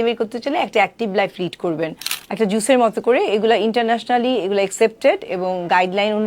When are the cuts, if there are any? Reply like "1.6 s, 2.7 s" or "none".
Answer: 2.1 s